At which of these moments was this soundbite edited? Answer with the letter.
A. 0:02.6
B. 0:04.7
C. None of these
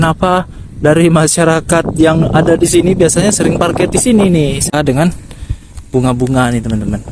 B